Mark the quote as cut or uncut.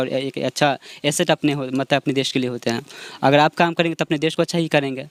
uncut